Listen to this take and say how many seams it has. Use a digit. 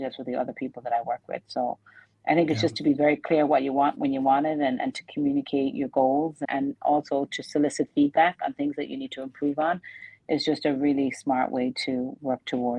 0